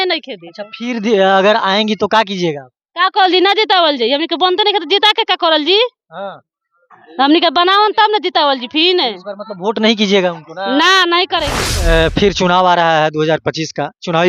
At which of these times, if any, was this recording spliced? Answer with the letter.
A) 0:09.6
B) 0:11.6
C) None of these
B